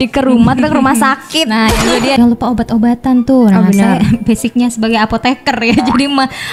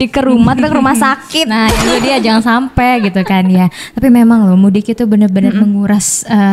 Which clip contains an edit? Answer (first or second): first